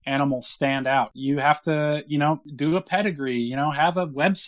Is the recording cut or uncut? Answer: cut